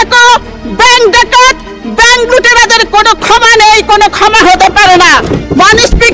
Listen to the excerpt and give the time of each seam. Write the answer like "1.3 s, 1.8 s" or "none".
none